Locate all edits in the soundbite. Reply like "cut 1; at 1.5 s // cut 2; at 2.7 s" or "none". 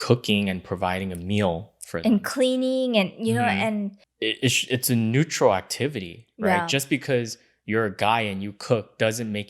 cut 1; at 4.0 s